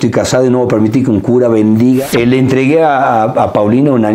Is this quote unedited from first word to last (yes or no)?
no